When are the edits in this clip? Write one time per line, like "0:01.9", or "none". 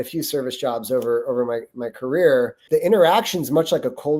0:02.6